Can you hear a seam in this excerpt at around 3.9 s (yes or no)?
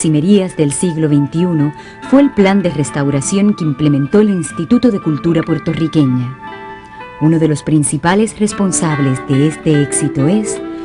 yes